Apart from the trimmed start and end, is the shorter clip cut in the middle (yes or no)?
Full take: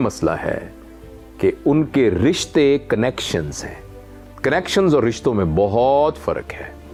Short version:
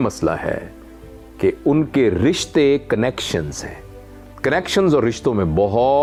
no